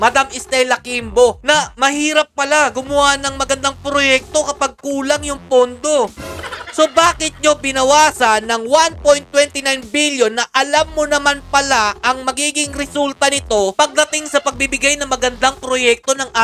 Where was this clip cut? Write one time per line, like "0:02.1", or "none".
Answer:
none